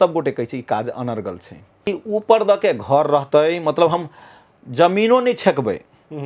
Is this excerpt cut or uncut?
cut